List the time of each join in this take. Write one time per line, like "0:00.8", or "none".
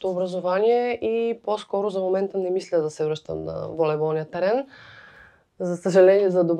none